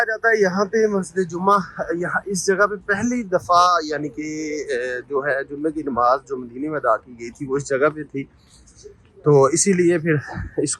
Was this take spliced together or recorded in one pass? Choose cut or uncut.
uncut